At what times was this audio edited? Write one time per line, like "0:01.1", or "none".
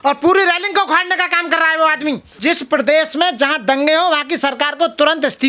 0:02.4

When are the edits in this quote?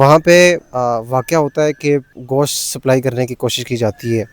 0:02.2

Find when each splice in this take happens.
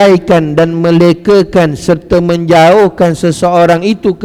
none

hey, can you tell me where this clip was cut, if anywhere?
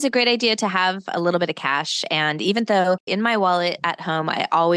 none

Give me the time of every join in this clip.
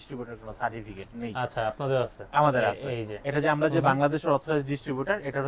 none

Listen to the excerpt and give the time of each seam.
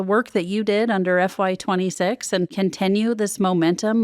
0:02.5

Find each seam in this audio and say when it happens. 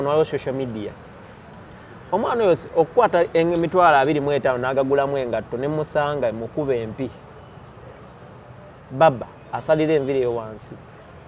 none

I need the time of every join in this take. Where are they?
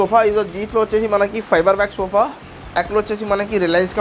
0:02.8

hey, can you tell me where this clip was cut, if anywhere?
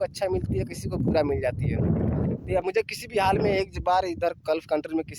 0:02.6

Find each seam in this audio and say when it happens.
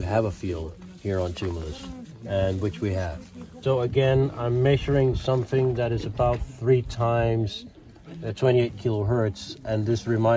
none

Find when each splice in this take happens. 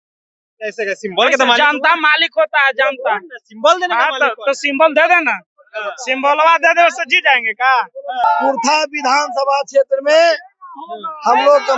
0:08.2

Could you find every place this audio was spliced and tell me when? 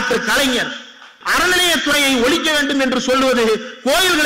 0:01.2

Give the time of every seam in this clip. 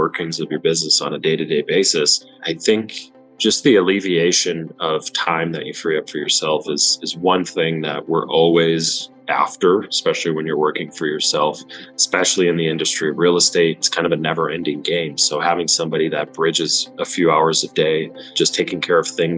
0:02.5
0:13.9
0:18.2

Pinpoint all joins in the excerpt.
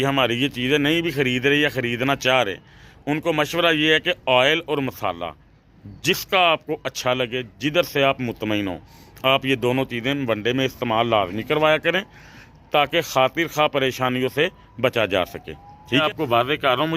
0:16.0

